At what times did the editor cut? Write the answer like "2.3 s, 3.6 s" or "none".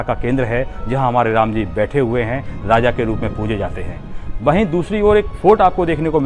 none